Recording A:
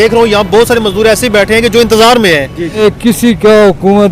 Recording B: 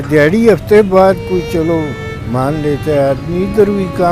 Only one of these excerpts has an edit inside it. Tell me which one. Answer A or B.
A